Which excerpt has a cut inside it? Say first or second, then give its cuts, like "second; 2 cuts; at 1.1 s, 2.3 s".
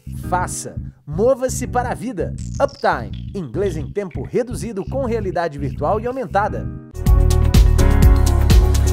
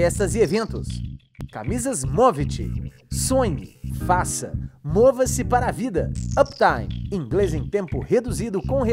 first; 1 cut; at 7.1 s